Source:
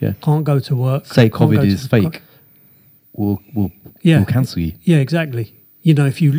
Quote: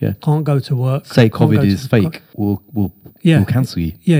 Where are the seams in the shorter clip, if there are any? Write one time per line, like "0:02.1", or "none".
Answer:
0:02.2